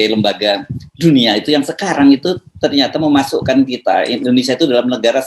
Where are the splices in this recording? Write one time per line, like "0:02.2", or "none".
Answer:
none